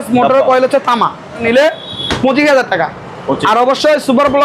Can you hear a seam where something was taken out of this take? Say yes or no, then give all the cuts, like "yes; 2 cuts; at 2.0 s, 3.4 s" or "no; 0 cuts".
yes; 1 cut; at 1.4 s